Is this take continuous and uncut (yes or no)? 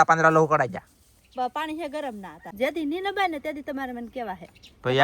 no